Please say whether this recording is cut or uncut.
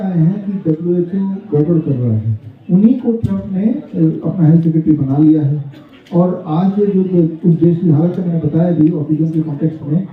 uncut